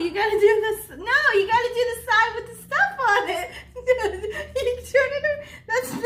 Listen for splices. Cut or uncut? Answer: uncut